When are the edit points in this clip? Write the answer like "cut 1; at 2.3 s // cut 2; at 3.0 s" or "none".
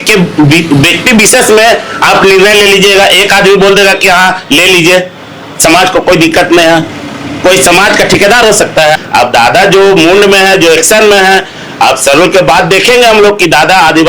cut 1; at 9.0 s